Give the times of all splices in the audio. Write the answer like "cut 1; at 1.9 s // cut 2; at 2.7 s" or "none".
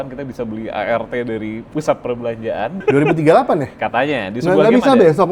cut 1; at 1.6 s // cut 2; at 2.8 s